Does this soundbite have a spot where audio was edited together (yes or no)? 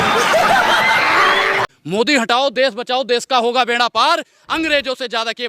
yes